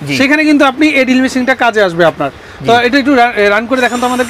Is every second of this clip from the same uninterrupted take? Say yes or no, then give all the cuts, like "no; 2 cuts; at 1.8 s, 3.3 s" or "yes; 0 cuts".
yes; 0 cuts